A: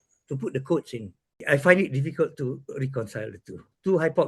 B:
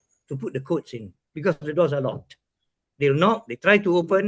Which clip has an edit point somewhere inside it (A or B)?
A